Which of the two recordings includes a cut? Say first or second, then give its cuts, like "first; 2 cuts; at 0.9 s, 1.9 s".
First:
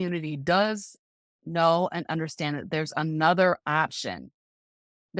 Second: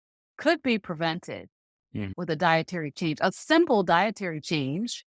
second; 1 cut; at 2.1 s